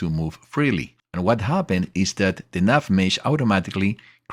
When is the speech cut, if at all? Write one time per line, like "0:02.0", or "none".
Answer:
0:01.0